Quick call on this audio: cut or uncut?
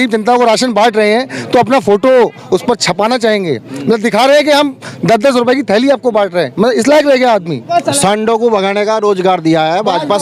cut